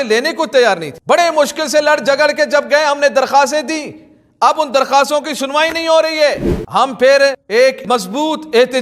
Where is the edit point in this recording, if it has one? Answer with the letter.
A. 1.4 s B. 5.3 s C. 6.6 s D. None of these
C